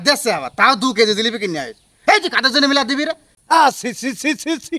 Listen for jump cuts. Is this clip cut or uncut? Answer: cut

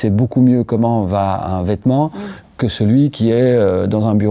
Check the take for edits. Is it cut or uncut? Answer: uncut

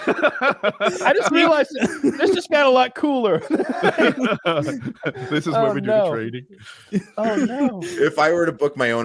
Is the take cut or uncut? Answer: uncut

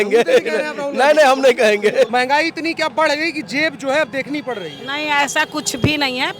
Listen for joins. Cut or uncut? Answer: cut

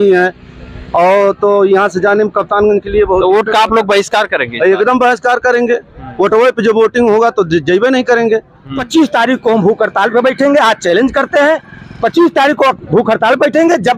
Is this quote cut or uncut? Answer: cut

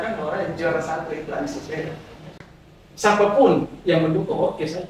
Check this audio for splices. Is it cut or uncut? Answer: cut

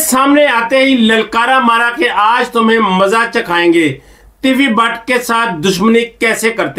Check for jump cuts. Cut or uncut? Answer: uncut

